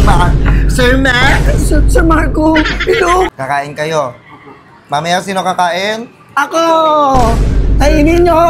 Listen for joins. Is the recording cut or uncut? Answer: cut